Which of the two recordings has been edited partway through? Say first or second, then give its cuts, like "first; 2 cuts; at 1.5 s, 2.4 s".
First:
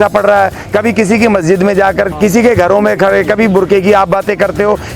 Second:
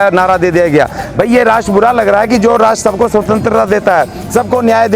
first; 1 cut; at 2.1 s